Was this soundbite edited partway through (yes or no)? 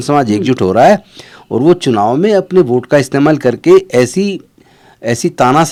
no